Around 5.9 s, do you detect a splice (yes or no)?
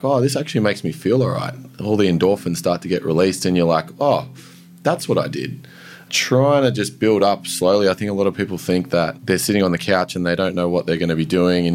yes